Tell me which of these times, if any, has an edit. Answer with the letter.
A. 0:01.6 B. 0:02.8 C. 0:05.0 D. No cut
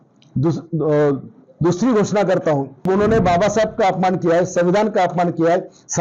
B